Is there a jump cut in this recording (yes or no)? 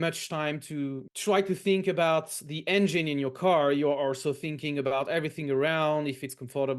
yes